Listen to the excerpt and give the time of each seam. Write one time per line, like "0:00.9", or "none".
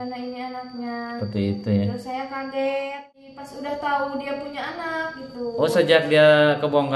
0:03.3

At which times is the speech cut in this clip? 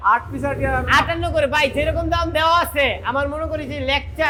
none

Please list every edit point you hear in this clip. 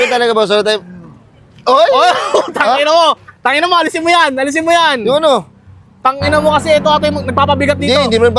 none

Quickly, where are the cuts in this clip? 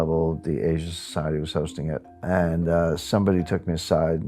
0:02.1

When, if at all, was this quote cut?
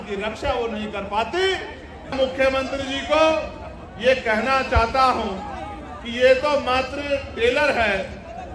0:02.1

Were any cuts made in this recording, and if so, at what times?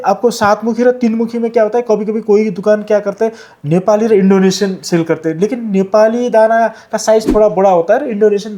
none

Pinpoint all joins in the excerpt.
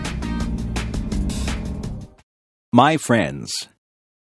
0:02.1

